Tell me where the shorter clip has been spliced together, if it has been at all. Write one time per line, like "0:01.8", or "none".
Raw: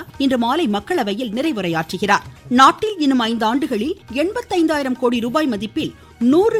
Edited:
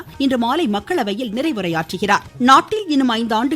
0:02.2